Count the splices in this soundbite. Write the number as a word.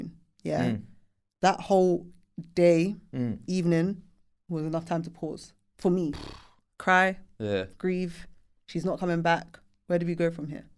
zero